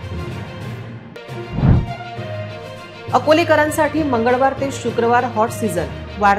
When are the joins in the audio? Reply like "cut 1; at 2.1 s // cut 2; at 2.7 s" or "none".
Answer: cut 1; at 1.1 s